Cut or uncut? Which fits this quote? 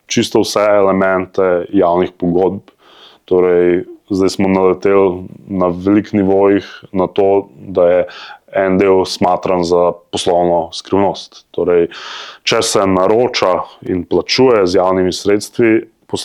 uncut